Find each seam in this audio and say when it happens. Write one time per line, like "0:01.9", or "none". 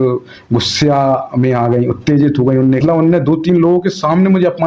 0:02.8